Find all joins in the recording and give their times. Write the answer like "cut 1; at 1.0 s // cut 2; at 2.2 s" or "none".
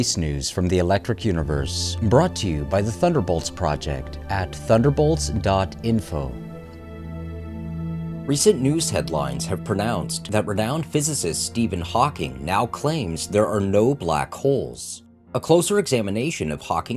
none